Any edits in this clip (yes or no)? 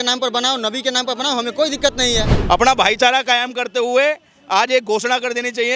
yes